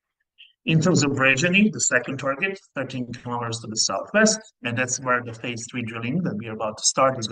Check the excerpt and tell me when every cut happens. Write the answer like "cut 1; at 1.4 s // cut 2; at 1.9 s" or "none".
cut 1; at 4.5 s